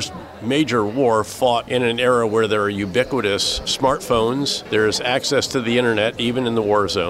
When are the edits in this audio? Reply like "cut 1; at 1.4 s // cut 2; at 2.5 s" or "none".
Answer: cut 1; at 1.6 s // cut 2; at 3.7 s // cut 3; at 4.6 s